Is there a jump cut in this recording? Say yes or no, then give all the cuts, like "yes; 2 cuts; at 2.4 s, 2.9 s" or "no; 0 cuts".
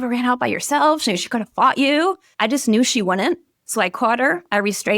yes; 2 cuts; at 2.3 s, 3.5 s